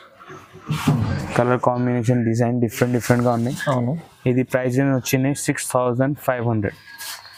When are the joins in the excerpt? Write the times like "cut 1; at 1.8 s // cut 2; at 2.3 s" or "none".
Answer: none

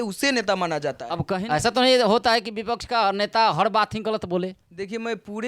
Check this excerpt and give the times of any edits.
cut 1; at 1.2 s

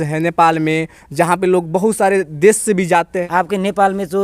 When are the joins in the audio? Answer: cut 1; at 3.2 s

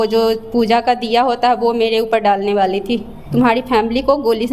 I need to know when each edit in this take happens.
cut 1; at 3.2 s

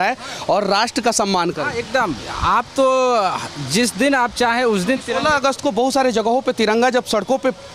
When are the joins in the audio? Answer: none

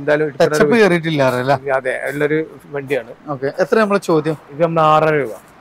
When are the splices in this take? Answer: none

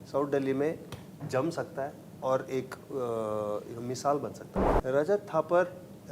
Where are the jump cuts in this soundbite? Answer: cut 1; at 4.4 s

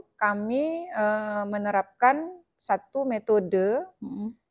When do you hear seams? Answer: none

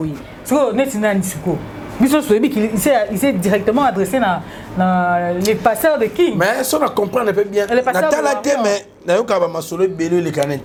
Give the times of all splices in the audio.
none

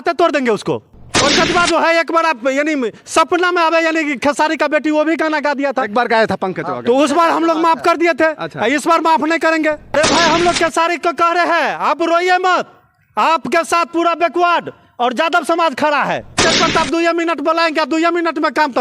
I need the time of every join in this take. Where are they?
cut 1; at 1.1 s // cut 2; at 9.9 s // cut 3; at 16.4 s

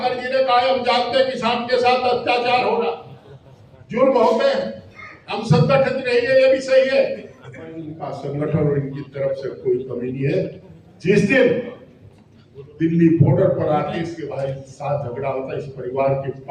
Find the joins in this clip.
cut 1; at 7.9 s

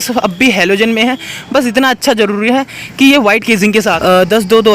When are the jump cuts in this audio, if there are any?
cut 1; at 3.8 s

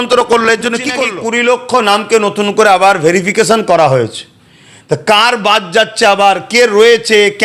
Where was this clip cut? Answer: cut 1; at 1.0 s

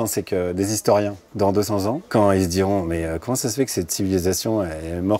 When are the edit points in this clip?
cut 1; at 1.2 s

